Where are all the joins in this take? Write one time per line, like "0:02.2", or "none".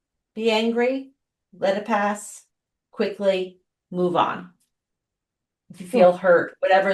none